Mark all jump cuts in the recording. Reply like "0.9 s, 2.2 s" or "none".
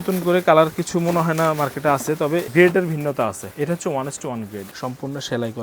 2.5 s, 3.5 s, 4.7 s